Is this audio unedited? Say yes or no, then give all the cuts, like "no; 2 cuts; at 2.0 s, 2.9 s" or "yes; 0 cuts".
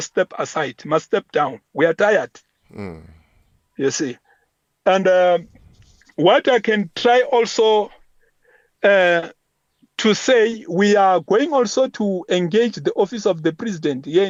yes; 0 cuts